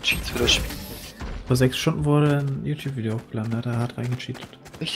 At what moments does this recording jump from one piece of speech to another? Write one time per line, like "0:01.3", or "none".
none